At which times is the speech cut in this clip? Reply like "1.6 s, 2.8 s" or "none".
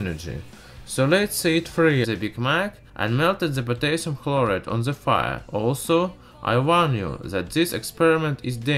none